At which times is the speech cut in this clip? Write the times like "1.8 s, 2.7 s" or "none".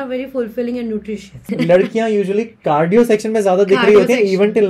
1.5 s